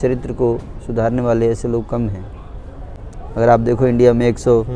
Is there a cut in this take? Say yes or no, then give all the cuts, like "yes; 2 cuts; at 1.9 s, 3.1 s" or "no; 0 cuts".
no; 0 cuts